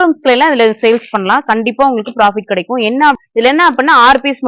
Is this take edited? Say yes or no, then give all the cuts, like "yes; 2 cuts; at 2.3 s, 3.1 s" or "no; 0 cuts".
yes; 1 cut; at 3.2 s